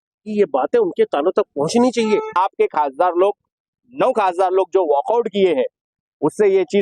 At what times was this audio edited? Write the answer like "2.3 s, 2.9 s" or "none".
2.3 s

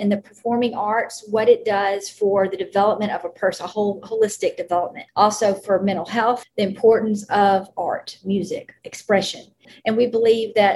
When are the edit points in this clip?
5.0 s, 6.5 s, 9.7 s

